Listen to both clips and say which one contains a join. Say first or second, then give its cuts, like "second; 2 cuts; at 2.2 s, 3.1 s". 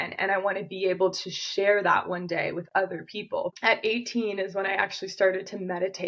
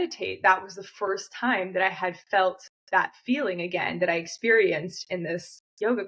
first; 1 cut; at 3.5 s